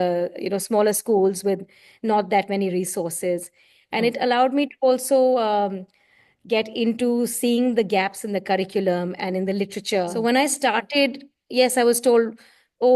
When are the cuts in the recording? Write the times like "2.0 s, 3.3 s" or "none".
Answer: 10.1 s